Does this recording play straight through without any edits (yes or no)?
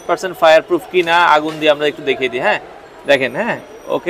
yes